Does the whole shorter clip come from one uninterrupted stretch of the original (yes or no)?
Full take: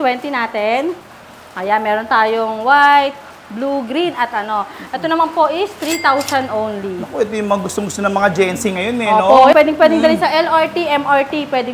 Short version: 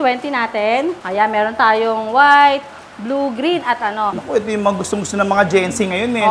no